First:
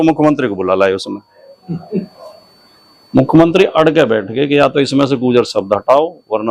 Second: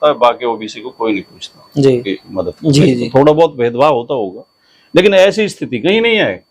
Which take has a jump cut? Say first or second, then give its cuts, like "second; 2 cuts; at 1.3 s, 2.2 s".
second; 1 cut; at 2.1 s